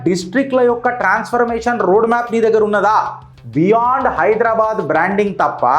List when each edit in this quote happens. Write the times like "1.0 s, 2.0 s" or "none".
none